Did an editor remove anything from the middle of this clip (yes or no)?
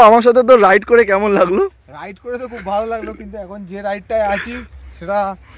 no